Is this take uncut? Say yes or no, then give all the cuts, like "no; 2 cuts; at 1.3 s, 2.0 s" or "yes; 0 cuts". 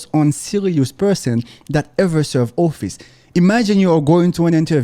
yes; 0 cuts